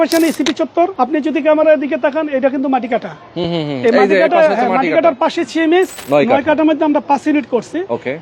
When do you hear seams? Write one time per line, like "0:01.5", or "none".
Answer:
0:00.9
0:06.0